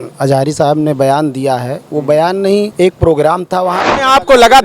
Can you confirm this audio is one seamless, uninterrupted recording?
no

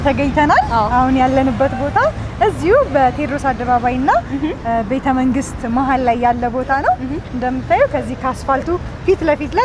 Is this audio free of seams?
yes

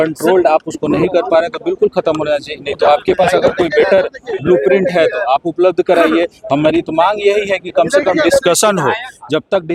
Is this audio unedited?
yes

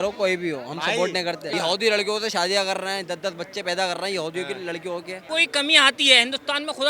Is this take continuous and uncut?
no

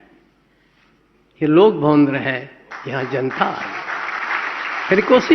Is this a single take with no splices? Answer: no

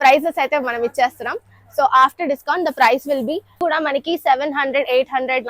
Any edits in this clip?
yes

